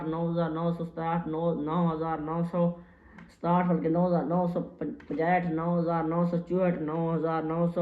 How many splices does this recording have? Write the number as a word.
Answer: one